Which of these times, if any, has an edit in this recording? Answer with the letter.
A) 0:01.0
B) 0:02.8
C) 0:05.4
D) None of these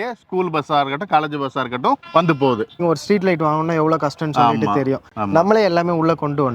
B